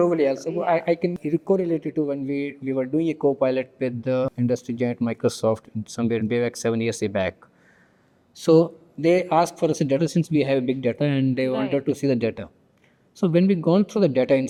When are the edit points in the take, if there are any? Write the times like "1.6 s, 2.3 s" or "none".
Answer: none